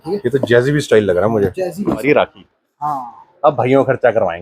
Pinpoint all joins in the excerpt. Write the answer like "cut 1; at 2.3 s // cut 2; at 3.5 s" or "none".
cut 1; at 2.0 s